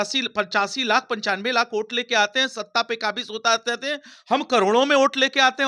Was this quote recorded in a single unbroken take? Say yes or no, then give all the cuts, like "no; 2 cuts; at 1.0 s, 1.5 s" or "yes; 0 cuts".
yes; 0 cuts